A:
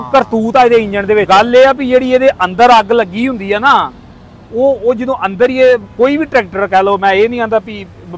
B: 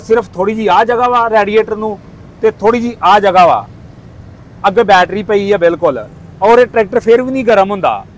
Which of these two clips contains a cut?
A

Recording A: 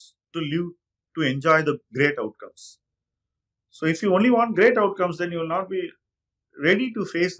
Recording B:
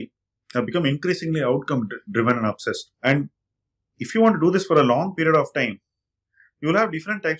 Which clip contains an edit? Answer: B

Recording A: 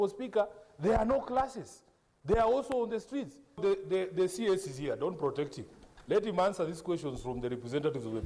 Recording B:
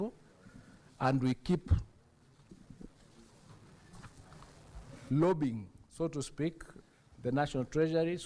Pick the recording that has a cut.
A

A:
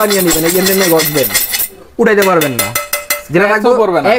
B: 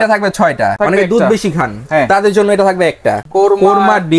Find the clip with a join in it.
B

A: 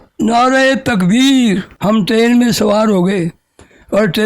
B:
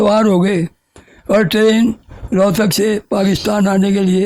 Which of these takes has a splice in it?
A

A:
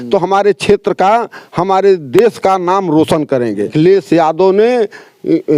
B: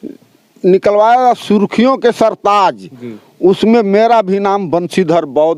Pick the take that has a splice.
A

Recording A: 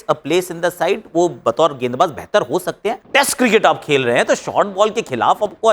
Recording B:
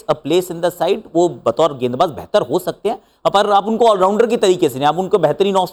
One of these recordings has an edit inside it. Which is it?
A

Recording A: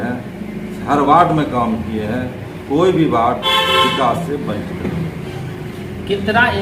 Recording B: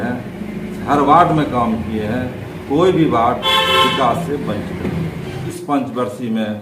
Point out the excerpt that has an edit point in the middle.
B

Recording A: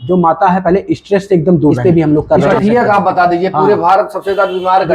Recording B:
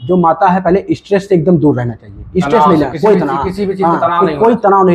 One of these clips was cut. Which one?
A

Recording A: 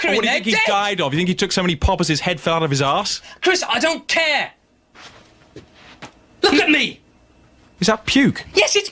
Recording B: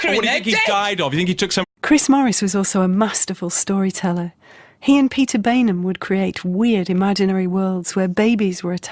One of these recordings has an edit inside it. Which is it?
A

